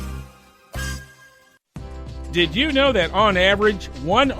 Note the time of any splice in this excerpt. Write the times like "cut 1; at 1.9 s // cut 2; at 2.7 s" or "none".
none